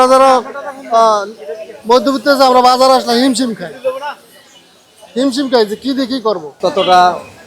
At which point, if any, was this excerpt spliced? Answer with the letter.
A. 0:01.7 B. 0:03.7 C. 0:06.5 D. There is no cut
D